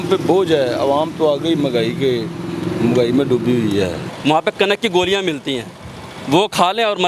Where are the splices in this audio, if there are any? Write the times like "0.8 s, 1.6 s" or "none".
4.1 s